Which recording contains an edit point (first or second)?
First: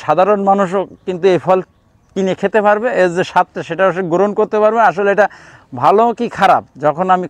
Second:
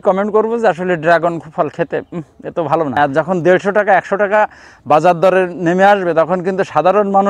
second